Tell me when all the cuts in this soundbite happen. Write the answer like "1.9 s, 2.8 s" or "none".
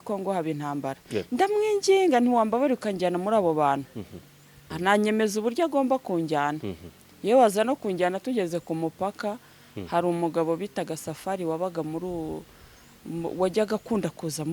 4.7 s